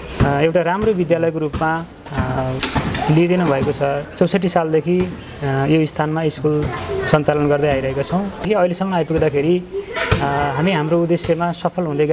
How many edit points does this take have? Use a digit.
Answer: 2